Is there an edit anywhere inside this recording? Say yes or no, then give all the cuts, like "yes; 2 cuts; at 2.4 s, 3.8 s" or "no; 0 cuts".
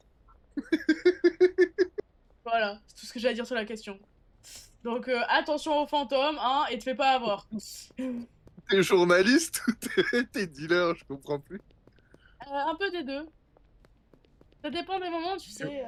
no; 0 cuts